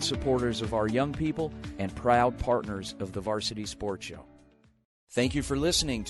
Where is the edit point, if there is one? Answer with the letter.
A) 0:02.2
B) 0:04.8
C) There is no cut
B